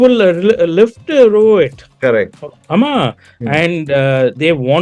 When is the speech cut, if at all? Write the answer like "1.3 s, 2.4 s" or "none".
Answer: 2.4 s